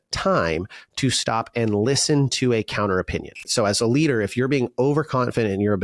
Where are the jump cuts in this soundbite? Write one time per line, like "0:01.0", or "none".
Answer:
0:03.5